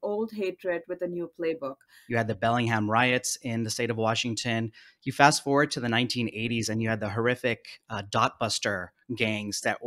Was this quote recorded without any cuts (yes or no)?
no